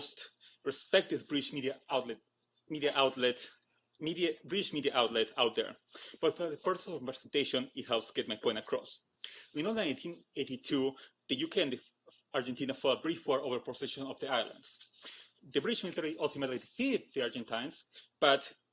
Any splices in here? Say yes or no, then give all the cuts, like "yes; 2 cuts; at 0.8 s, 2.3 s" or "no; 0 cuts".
yes; 1 cut; at 6.0 s